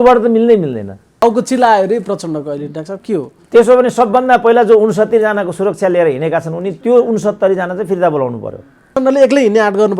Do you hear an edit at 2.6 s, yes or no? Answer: no